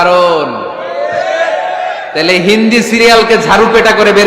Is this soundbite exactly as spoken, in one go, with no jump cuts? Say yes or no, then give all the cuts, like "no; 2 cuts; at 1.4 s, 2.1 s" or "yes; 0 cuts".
yes; 0 cuts